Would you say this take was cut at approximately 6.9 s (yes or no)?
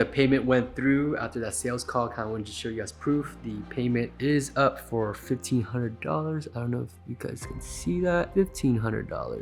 no